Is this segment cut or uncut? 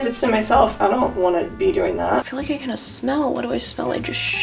cut